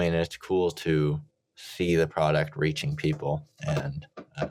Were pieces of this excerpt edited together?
no; 0 cuts

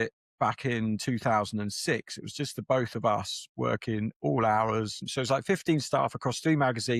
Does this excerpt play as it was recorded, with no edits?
no; 1 cut; at 5.0 s

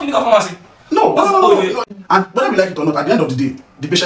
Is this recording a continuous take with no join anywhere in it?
no; 1 cut; at 1.8 s

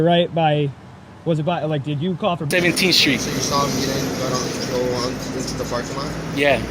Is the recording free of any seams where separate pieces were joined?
no; 1 cut; at 2.5 s

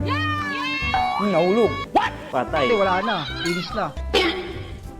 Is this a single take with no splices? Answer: no; 1 cut; at 4.0 s

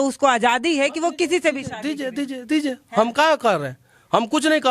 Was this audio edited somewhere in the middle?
no; 0 cuts

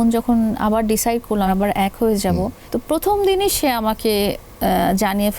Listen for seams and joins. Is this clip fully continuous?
no; 2 cuts; at 1.5 s, 2.6 s

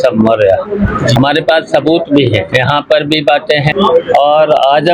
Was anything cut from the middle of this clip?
yes; 3 cuts; at 1.2 s, 2.5 s, 3.7 s

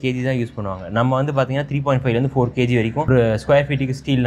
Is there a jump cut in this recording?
yes; 1 cut; at 3.1 s

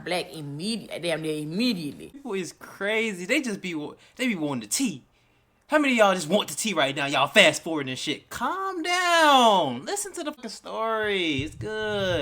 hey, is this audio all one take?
no; 2 cuts; at 2.2 s, 10.4 s

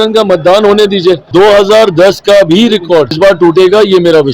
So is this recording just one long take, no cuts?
no; 2 cuts; at 1.2 s, 3.2 s

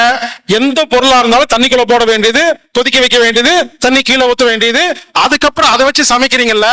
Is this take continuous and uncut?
yes; 0 cuts

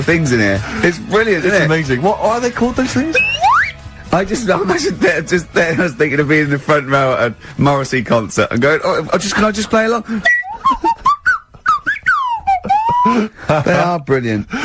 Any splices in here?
no; 0 cuts

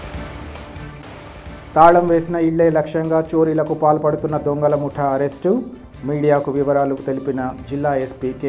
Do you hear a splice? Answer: yes; 1 cut; at 1.4 s

